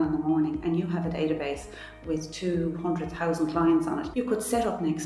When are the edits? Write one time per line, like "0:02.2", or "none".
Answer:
0:04.1

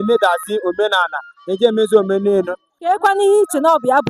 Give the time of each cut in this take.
0:02.6

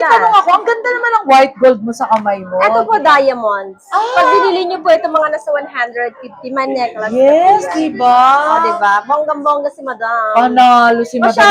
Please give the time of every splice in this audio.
none

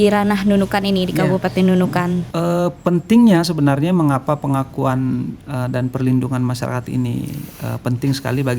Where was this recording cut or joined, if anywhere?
0:02.3

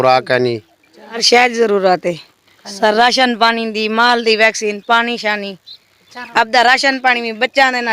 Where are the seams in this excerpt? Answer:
0:01.1
0:06.1

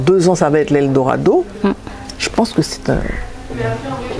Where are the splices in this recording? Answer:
none

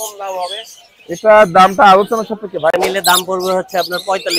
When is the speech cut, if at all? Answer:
0:02.7

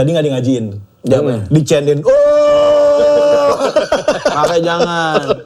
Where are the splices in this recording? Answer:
none

